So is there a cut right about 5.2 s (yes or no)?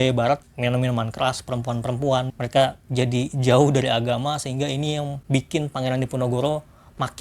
yes